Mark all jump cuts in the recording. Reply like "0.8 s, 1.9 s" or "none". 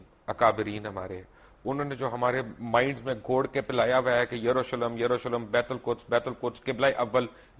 none